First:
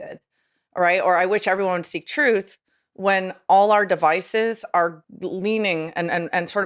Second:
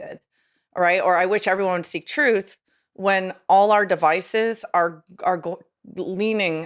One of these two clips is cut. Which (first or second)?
first